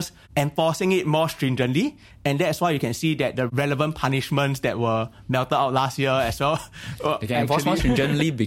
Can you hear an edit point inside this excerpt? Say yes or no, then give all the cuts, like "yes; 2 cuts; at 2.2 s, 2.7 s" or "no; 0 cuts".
no; 0 cuts